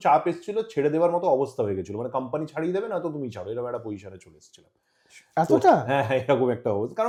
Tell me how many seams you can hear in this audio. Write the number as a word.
zero